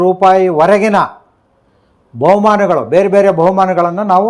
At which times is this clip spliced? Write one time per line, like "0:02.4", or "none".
none